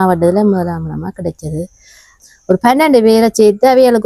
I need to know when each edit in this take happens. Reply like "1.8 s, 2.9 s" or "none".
2.1 s